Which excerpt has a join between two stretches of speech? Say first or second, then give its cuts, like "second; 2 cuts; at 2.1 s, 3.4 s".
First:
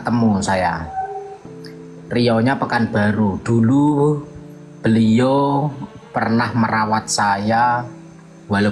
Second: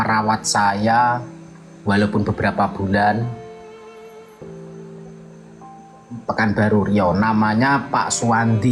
second; 2 cuts; at 3.3 s, 6.2 s